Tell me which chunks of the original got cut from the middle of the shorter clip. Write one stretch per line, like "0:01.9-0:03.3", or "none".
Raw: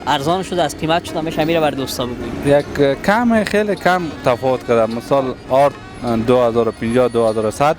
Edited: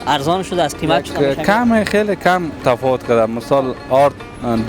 0:01.1-0:02.7

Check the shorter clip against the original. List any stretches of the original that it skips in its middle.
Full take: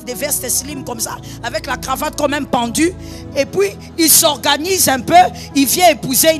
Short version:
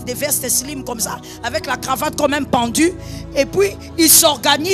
none

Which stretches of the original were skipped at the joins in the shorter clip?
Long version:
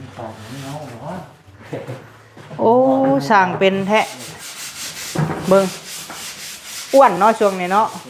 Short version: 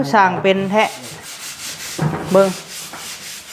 none

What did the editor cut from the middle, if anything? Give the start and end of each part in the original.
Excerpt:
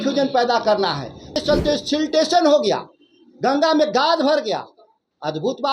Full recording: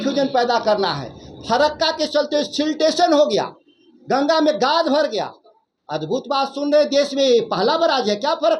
0:01.4-0:02.0

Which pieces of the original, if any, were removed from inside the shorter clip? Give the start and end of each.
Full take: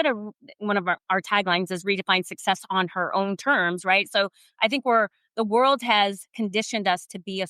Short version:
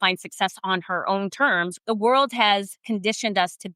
0:03.8-0:05.2

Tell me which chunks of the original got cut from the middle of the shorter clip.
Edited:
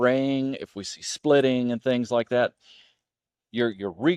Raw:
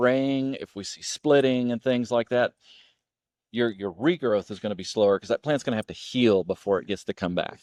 none

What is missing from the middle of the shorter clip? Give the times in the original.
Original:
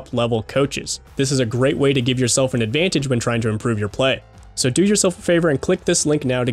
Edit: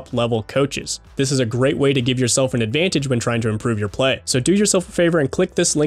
0:04.2-0:04.5

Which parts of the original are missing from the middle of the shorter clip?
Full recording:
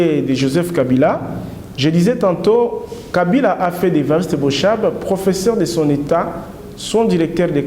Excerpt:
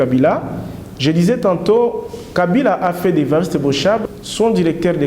0:04.8-0:06.6

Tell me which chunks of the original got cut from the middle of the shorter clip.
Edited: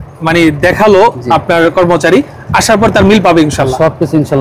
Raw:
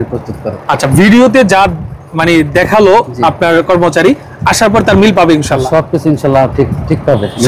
none

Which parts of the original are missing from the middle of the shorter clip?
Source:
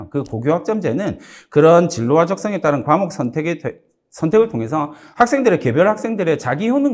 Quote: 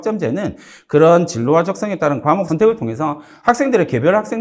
0:03.1-0:04.2

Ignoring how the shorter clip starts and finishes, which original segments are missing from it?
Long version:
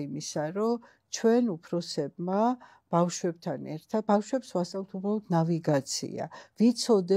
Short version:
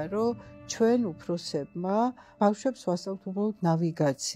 0:02.8-0:04.0

